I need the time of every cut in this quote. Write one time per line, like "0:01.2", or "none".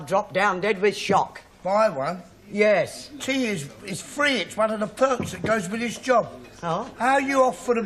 0:03.5